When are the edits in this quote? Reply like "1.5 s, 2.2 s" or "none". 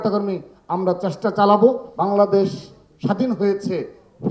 1.9 s